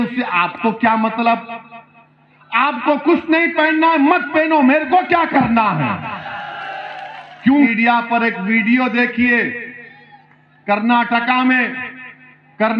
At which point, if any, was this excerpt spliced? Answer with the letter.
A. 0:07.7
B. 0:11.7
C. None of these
A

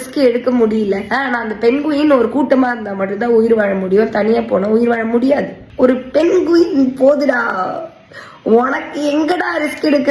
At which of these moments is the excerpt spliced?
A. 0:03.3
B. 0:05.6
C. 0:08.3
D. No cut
B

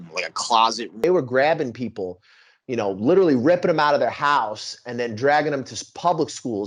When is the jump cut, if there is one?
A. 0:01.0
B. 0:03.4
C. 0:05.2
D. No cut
A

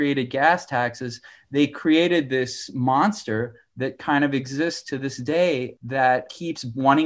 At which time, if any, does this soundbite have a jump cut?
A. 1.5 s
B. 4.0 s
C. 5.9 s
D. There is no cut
C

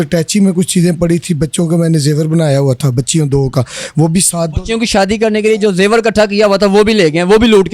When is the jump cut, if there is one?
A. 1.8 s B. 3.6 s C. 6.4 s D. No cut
D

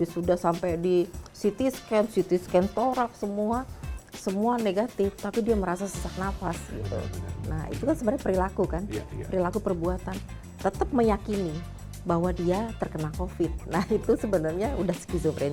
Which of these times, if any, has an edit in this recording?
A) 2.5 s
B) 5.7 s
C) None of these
C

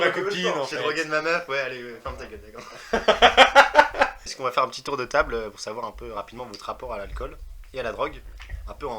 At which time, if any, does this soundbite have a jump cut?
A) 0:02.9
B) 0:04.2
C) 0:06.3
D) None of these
B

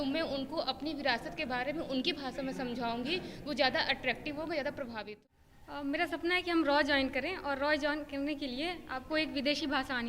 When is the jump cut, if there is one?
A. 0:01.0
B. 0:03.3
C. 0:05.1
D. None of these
C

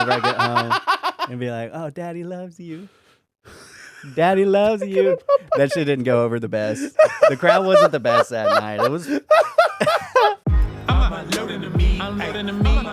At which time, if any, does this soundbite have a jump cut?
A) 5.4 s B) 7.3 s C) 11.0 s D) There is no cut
C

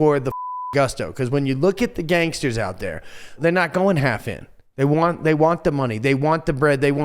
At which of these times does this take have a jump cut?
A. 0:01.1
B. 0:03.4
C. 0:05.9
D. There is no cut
B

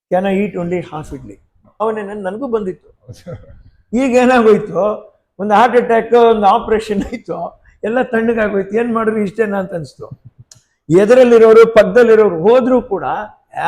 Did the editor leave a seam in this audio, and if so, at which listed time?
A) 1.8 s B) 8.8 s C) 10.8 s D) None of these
A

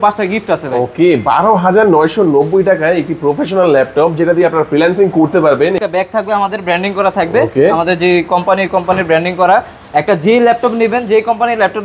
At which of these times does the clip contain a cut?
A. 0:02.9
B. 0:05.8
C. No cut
B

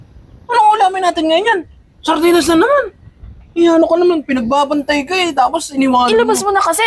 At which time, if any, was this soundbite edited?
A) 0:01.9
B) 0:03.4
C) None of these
C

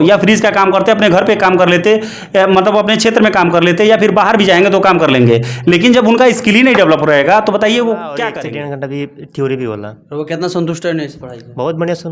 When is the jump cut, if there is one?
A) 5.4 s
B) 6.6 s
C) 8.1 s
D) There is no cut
C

